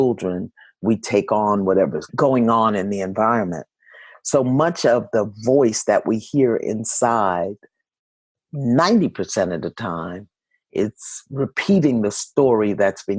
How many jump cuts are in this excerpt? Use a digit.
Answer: 1